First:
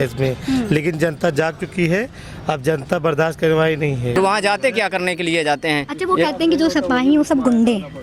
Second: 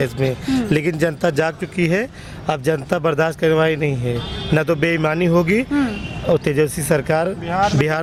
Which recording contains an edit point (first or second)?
first